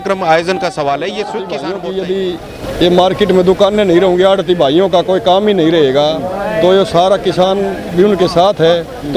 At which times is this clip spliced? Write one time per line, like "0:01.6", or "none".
0:01.6